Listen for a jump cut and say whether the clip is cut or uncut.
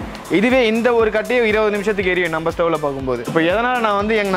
uncut